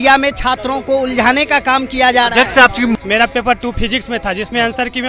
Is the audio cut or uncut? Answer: cut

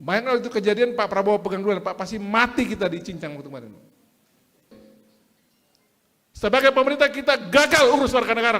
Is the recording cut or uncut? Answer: cut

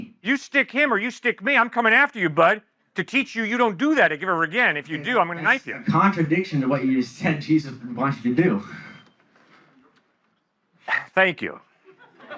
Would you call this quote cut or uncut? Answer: cut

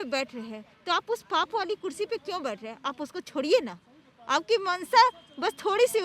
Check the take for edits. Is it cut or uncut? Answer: uncut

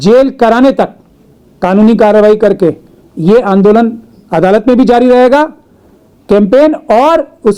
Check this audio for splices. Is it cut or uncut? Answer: uncut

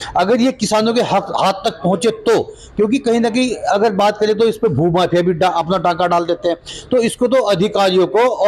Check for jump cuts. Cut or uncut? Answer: uncut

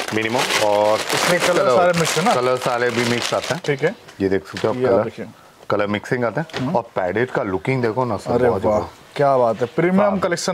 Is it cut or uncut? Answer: uncut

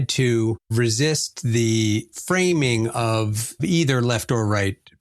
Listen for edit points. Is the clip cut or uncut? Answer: uncut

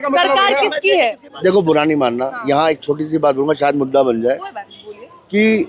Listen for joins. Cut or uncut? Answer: cut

